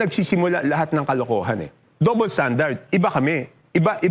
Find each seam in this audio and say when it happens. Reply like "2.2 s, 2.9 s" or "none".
1.8 s